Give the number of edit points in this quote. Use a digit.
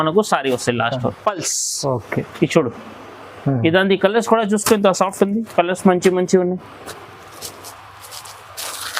1